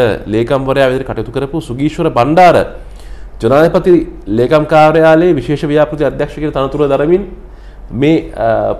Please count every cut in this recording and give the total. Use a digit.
0